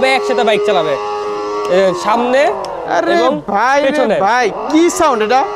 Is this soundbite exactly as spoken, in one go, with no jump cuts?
yes; 0 cuts

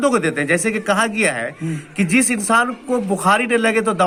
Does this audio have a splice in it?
no; 0 cuts

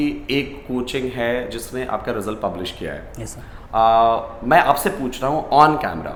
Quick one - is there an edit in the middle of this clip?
no; 0 cuts

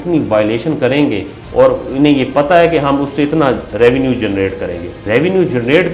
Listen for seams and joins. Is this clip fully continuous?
no; 1 cut; at 5.0 s

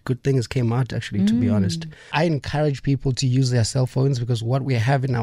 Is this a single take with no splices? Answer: no; 1 cut; at 2.1 s

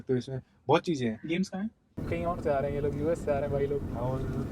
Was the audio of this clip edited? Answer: yes; 1 cut; at 2.0 s

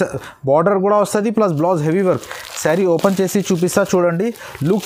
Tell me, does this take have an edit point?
no; 0 cuts

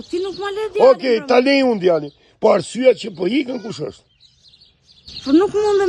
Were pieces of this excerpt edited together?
no; 0 cuts

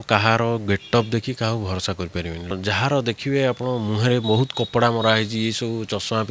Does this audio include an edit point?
yes; 1 cut; at 2.6 s

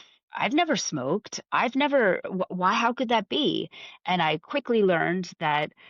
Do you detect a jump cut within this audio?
no; 0 cuts

